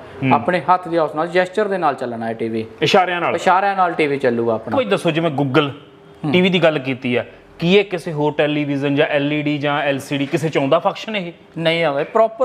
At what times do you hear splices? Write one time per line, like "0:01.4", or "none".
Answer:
0:04.8